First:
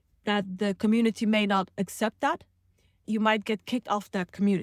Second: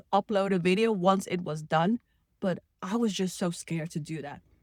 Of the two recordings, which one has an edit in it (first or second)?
first